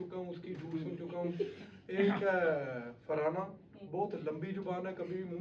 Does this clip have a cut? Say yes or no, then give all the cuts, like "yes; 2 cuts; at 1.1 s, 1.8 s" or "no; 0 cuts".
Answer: no; 0 cuts